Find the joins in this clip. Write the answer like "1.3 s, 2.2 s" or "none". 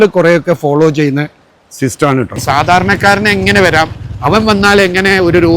2.4 s